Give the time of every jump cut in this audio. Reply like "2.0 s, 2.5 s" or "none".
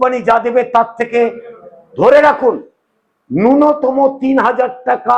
none